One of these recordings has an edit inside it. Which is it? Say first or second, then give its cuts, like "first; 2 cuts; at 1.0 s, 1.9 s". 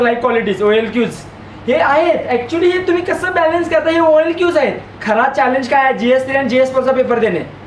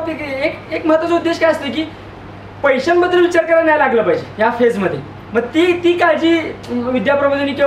first; 1 cut; at 4.9 s